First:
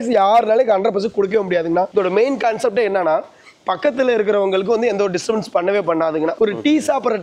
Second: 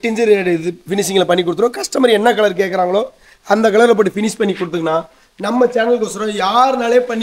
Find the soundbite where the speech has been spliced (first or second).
first